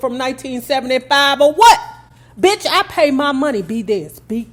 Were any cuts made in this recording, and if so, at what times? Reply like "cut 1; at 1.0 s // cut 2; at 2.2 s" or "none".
none